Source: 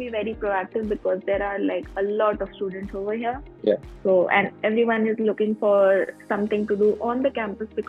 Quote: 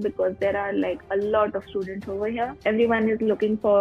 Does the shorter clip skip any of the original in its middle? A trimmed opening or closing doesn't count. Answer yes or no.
yes